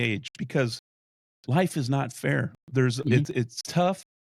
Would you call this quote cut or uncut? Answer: uncut